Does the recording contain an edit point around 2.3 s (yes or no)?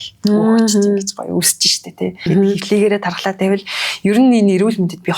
yes